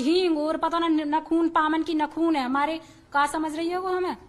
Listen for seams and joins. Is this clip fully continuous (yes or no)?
yes